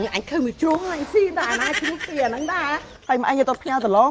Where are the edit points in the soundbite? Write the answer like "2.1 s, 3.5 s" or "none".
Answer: 2.8 s